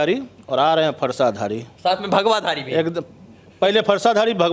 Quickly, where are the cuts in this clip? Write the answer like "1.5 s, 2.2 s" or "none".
none